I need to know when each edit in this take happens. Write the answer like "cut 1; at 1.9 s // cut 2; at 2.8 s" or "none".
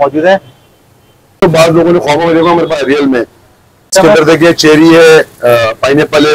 cut 1; at 1.4 s // cut 2; at 3.9 s